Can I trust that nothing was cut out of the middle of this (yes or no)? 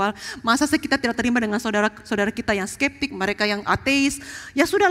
yes